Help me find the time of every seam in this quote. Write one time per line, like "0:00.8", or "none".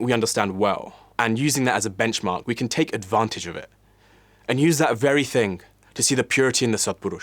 0:01.0